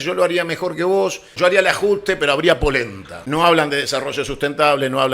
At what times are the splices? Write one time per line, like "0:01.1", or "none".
0:01.3
0:03.2

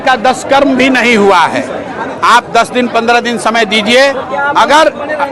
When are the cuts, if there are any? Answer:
none

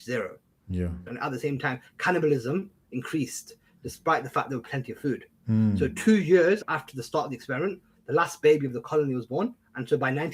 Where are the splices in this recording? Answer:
0:01.1
0:06.6

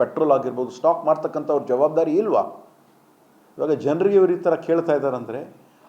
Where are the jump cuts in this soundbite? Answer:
none

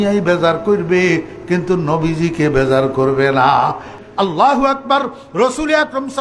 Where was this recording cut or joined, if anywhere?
0:04.0

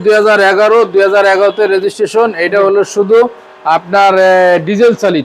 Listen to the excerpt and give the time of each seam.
none

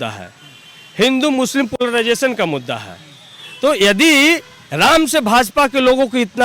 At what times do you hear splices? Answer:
none

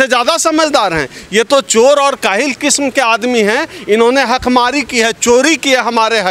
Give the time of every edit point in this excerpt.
none

